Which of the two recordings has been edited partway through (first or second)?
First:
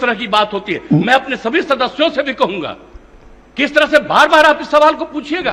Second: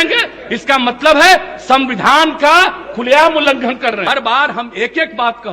second